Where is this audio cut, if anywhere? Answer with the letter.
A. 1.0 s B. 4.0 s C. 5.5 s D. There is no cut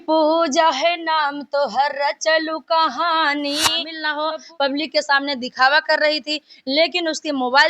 B